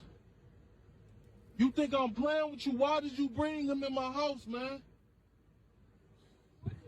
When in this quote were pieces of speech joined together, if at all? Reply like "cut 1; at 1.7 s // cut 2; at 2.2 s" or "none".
cut 1; at 2.3 s

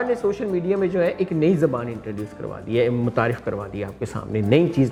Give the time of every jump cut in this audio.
none

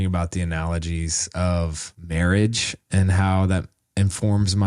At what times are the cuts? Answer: cut 1; at 1.9 s

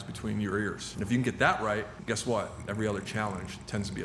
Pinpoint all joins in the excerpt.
cut 1; at 0.9 s // cut 2; at 1.9 s

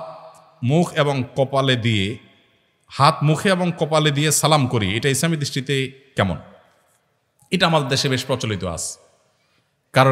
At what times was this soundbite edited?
none

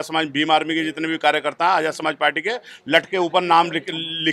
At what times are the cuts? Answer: none

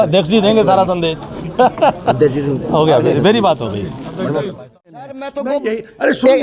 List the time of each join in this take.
cut 1; at 4.8 s

